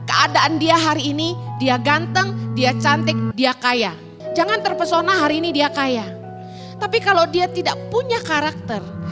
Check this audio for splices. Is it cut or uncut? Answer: cut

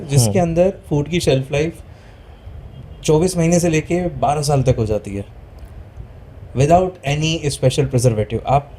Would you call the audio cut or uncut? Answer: uncut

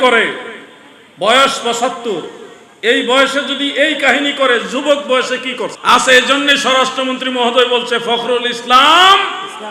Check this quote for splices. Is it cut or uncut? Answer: cut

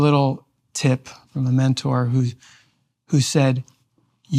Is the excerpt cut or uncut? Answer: cut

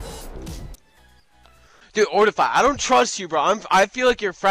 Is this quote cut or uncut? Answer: cut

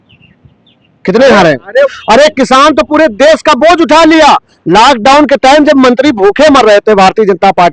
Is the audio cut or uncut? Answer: cut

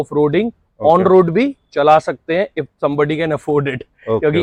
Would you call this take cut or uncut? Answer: uncut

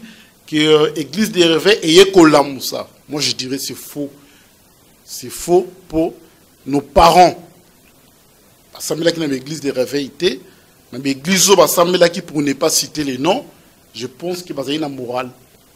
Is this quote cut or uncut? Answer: uncut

